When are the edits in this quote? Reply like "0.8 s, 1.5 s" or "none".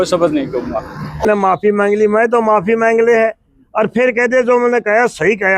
1.2 s